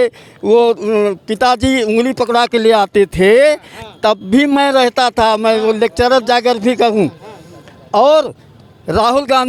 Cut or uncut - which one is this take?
uncut